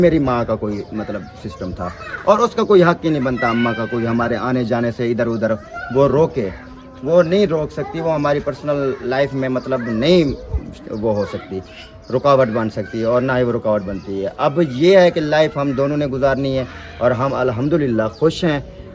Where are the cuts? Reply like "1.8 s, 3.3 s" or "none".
none